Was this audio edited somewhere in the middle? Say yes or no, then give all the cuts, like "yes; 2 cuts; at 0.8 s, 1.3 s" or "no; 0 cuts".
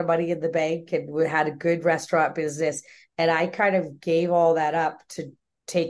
no; 0 cuts